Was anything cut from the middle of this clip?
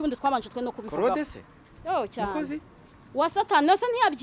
no; 0 cuts

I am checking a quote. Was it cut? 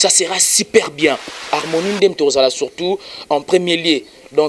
yes; 1 cut; at 1.5 s

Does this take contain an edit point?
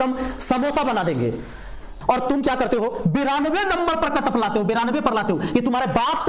yes; 1 cut; at 1.9 s

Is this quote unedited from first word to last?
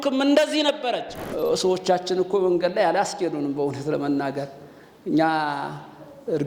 no; 1 cut; at 1.2 s

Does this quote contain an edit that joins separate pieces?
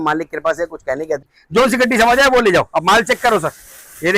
yes; 1 cut; at 1.3 s

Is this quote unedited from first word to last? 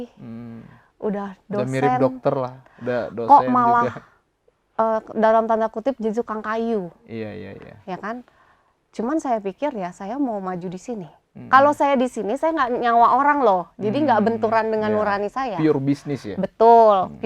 yes; 0 cuts

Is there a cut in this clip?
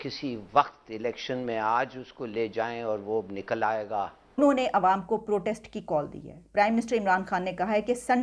yes; 1 cut; at 4.4 s

